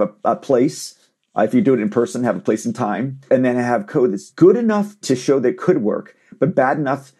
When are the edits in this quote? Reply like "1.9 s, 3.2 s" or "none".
5.0 s